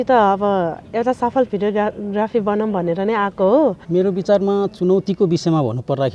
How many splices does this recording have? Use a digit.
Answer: 1